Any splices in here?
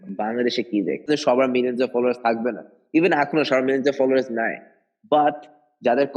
yes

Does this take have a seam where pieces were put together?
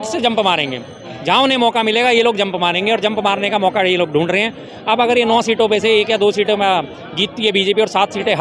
no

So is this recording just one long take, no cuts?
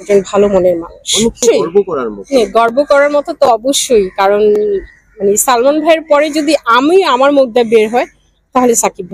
yes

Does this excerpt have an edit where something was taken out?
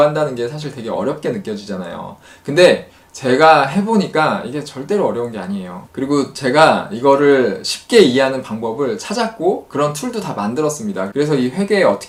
no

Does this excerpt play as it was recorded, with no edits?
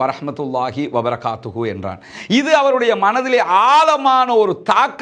yes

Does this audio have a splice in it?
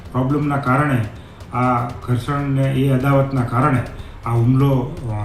no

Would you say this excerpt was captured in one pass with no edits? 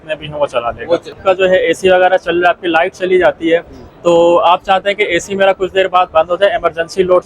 no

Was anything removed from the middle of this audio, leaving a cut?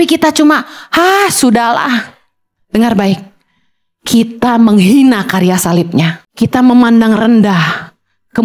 yes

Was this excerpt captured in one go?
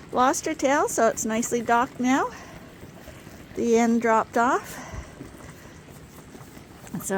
yes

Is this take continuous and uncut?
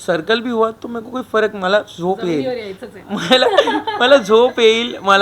yes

